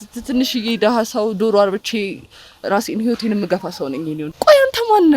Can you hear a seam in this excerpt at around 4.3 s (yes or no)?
yes